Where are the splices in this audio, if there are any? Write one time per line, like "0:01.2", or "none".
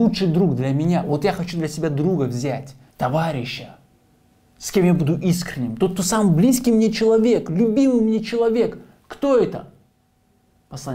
0:02.8